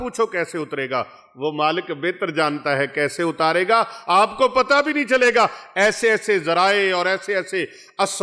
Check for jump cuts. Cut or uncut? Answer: uncut